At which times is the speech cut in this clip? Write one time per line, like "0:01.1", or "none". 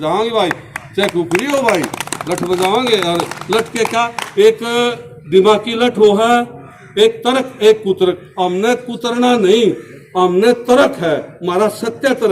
none